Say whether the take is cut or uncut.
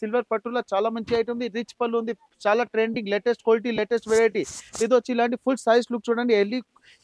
uncut